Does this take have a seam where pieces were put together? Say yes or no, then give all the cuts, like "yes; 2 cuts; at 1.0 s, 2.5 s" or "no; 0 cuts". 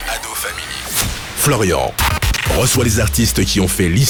no; 0 cuts